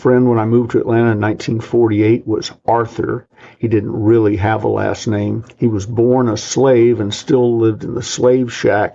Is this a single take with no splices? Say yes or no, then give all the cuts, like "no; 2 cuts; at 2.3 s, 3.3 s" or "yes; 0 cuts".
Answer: yes; 0 cuts